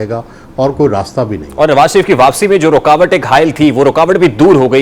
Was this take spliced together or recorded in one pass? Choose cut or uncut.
uncut